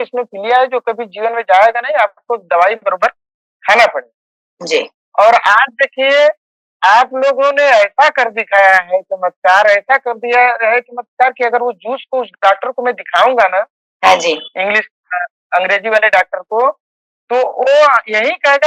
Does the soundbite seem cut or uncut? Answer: uncut